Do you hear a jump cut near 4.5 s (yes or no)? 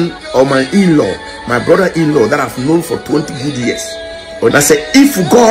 yes